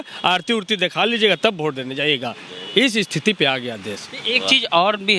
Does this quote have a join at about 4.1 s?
no; 0 cuts

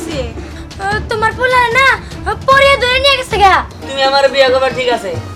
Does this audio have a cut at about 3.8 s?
yes; 1 cut; at 3.8 s

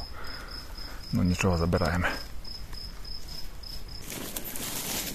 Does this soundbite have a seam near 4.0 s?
yes; 1 cut; at 4.0 s

